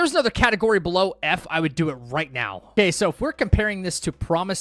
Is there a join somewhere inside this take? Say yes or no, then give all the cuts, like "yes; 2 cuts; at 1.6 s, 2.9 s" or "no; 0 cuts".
yes; 1 cut; at 2.7 s